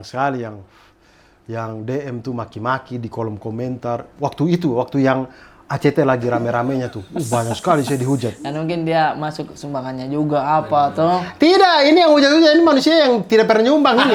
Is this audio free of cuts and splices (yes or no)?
yes